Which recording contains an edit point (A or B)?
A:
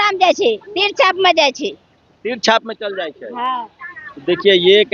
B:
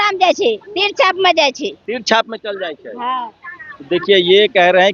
B